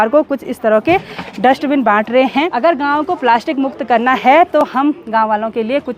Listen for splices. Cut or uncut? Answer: cut